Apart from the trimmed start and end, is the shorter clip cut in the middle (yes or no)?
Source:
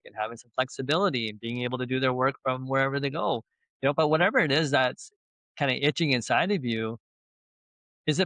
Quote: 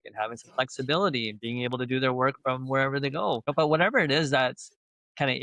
yes